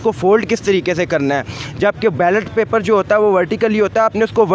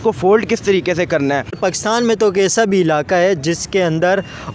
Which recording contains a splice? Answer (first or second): second